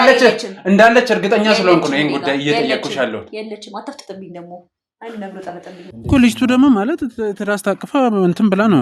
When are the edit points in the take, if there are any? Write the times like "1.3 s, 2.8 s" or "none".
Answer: 5.9 s